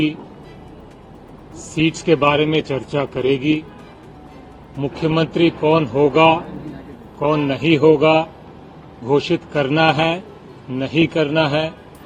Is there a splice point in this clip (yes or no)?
no